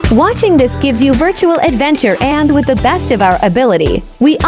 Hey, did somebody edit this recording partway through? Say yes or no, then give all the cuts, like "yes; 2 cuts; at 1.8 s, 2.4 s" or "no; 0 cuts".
no; 0 cuts